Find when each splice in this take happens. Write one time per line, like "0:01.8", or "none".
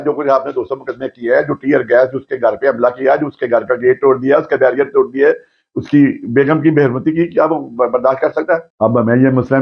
0:08.7